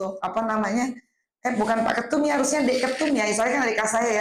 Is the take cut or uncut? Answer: uncut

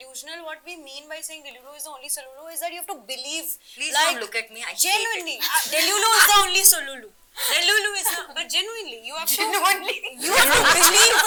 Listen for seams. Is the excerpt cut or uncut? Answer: uncut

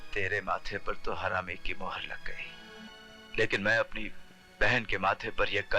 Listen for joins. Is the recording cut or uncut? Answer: cut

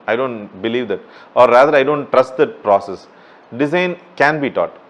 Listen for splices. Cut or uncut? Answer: uncut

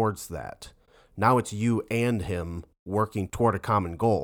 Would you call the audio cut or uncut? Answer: cut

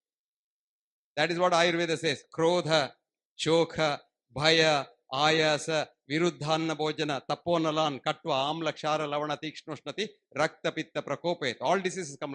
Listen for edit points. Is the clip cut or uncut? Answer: uncut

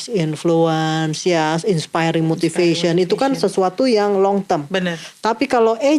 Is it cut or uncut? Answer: uncut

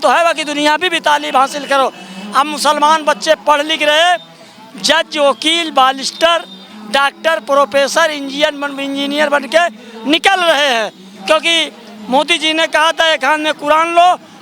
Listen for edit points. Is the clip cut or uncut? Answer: uncut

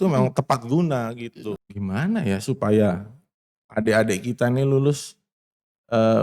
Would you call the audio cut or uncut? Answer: cut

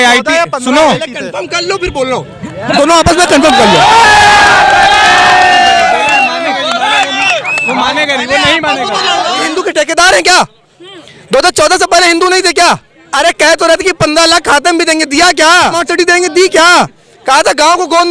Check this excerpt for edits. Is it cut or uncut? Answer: cut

